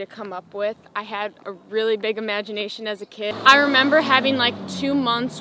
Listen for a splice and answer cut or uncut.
cut